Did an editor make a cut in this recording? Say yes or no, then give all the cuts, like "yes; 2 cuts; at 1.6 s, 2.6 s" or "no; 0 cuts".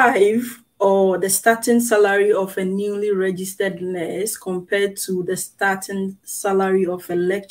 no; 0 cuts